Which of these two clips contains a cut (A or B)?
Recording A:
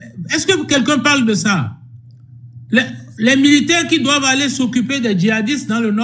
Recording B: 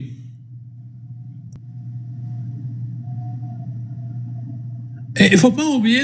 B